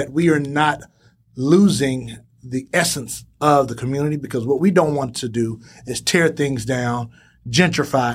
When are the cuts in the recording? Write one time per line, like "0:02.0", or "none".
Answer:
none

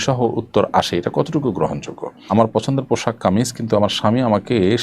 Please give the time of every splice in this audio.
0:02.3

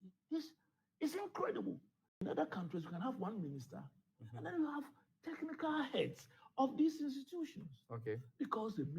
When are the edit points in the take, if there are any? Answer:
0:02.0

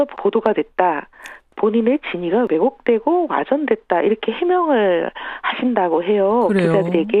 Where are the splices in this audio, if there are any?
0:03.0

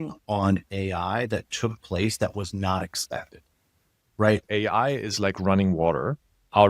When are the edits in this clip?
0:04.4

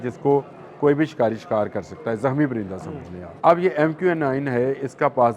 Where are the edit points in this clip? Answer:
0:03.2

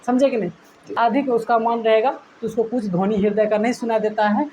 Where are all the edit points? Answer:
0:00.9

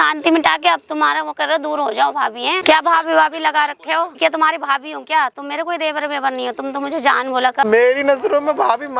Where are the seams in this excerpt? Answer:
0:02.6
0:04.2
0:07.6

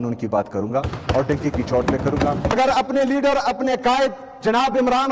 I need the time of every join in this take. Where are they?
0:02.5

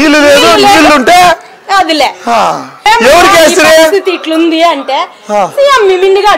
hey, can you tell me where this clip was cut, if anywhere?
0:02.7

